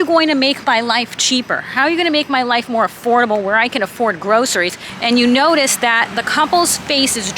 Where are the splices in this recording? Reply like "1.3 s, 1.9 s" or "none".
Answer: 4.9 s